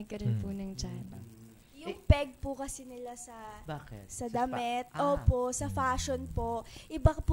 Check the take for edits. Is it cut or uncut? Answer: cut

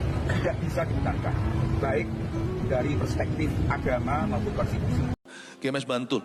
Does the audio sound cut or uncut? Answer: cut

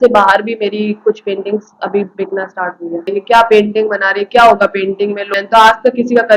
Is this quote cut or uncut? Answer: cut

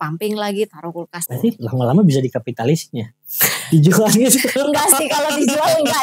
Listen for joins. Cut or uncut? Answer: cut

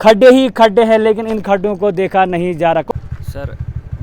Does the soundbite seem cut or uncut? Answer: cut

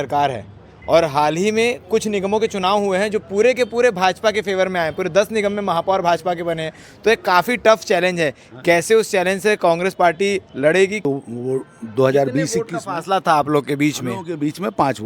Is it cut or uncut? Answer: cut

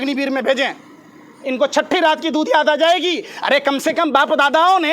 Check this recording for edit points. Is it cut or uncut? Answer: uncut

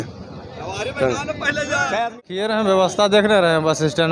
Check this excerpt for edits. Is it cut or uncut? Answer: cut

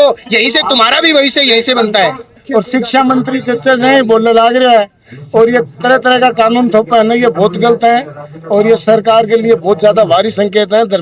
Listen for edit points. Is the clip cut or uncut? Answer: cut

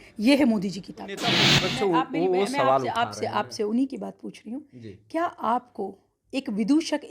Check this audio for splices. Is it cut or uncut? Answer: cut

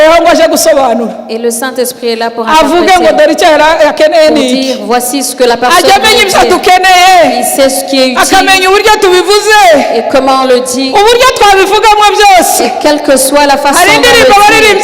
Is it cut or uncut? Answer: uncut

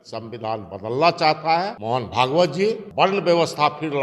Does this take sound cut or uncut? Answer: cut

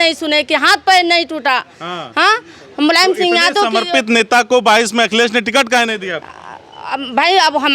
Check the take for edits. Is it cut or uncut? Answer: uncut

